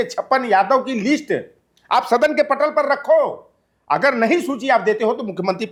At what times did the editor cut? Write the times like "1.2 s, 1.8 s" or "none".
none